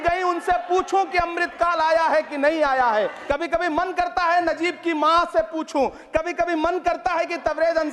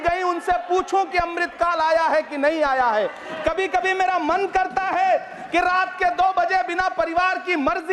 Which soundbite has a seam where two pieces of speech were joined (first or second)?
first